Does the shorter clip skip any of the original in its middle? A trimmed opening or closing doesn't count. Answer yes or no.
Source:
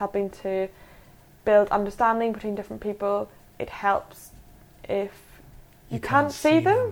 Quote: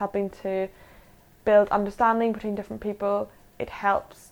no